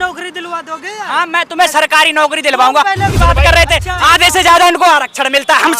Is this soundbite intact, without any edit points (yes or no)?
no